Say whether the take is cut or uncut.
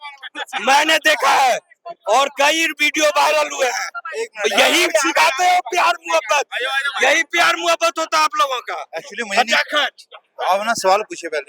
uncut